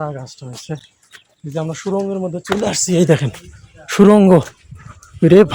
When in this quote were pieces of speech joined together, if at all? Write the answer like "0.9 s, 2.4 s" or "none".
none